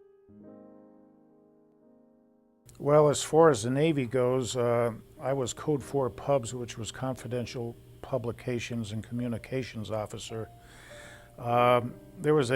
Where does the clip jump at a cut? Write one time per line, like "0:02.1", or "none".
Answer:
0:08.2